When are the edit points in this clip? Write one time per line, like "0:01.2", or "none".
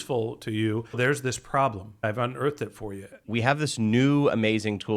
0:01.0
0:02.0
0:03.2